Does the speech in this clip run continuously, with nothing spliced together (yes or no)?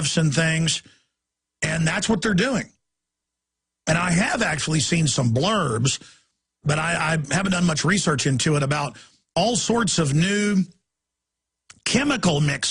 no